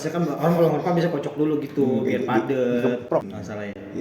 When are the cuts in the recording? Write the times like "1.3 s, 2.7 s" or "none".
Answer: 3.0 s